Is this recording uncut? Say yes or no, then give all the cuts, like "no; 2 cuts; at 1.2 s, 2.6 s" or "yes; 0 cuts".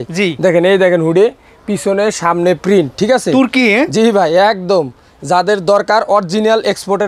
yes; 0 cuts